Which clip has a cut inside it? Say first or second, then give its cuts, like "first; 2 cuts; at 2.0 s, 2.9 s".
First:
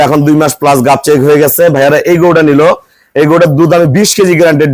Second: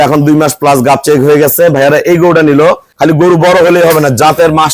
second; 1 cut; at 2.9 s